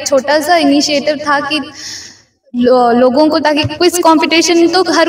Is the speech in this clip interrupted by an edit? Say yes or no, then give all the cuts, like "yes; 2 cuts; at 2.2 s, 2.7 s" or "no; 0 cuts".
no; 0 cuts